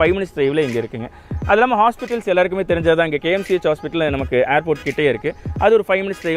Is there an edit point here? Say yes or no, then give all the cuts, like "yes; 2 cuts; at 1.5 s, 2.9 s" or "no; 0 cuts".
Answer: no; 0 cuts